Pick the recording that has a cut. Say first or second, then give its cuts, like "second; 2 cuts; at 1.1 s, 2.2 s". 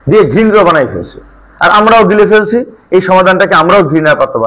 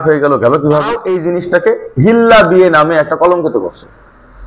second; 1 cut; at 1.2 s